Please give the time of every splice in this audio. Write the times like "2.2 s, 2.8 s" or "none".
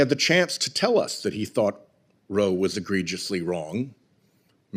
none